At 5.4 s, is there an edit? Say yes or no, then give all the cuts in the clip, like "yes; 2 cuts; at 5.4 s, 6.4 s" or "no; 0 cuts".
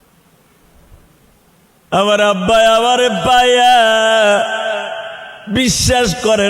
no; 1 cut; at 1.2 s